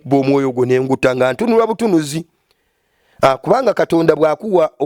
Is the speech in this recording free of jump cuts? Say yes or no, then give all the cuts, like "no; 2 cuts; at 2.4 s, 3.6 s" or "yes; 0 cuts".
yes; 0 cuts